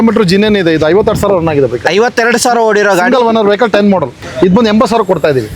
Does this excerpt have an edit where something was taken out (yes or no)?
yes